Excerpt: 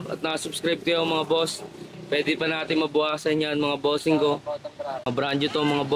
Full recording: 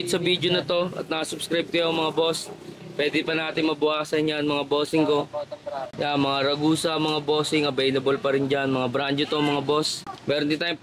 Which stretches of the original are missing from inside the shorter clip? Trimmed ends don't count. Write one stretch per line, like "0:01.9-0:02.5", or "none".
0:05.9-0:08.8